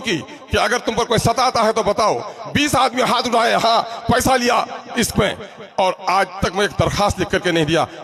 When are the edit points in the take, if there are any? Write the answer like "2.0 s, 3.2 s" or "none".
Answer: none